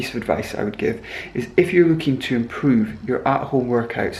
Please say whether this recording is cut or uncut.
uncut